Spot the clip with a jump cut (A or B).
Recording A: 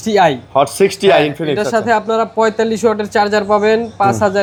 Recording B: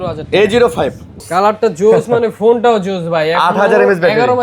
B